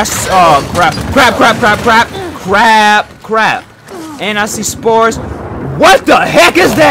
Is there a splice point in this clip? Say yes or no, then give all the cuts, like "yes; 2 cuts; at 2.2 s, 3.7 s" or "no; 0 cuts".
no; 0 cuts